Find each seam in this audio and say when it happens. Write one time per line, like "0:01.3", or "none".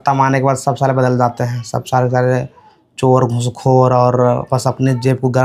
none